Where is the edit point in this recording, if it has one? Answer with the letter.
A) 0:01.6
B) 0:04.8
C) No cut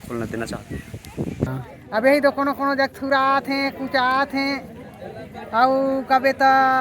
A